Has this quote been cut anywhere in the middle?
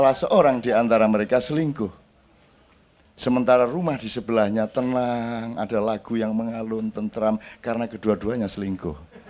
no; 0 cuts

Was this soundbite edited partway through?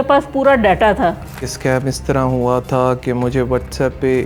yes; 1 cut; at 1.5 s

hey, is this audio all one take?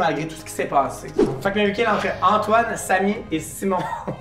no; 1 cut; at 1.3 s

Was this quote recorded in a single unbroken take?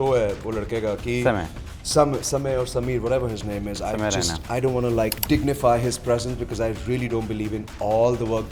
no; 1 cut; at 5.2 s

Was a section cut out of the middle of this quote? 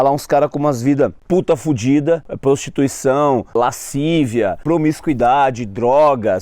yes; 4 cuts; at 1.2 s, 2.3 s, 3.5 s, 4.6 s

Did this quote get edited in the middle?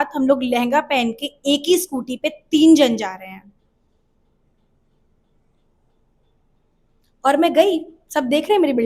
no; 0 cuts

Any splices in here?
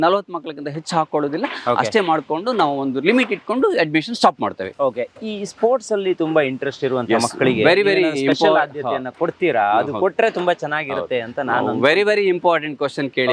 no; 0 cuts

